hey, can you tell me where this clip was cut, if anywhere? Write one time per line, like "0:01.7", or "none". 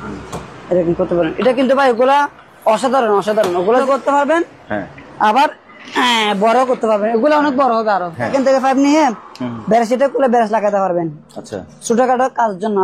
0:03.8
0:08.3